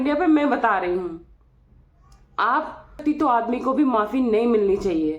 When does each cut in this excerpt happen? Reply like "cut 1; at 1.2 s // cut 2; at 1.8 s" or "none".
cut 1; at 3.0 s